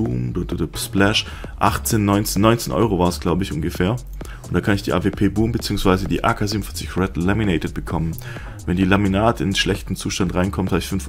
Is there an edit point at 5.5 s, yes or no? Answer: yes